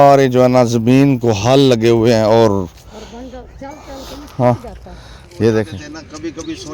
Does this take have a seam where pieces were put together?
yes; 1 cut; at 5.8 s

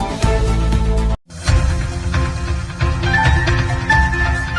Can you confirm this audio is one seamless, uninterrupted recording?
yes; 0 cuts

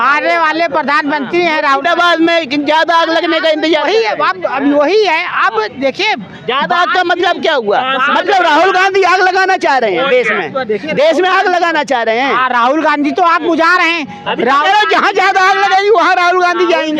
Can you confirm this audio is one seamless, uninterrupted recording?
yes; 0 cuts

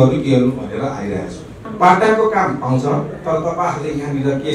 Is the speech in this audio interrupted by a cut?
yes; 1 cut; at 1.6 s

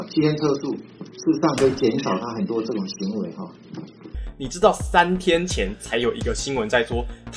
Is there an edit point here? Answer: yes; 1 cut; at 4.1 s

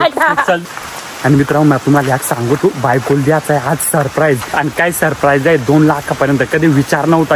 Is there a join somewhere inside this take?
yes; 2 cuts; at 1.0 s, 4.5 s

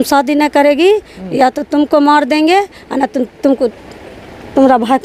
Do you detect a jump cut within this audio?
no; 0 cuts

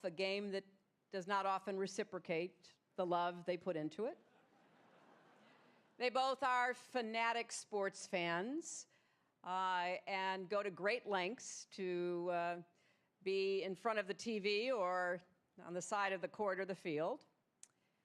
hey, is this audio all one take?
no; 1 cut; at 5.8 s

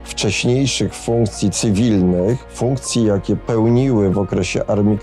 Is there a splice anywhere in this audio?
yes; 1 cut; at 2.6 s

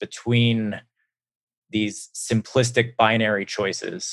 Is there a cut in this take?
no; 0 cuts

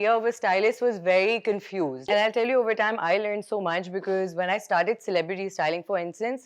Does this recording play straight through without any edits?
no; 1 cut; at 2.0 s

